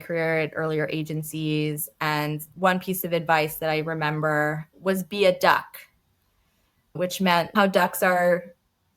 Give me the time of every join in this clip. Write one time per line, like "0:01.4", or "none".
0:04.7
0:07.5